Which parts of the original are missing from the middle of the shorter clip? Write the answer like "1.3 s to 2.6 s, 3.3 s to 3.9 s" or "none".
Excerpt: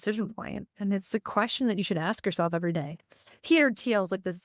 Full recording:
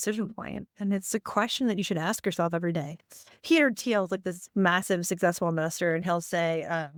none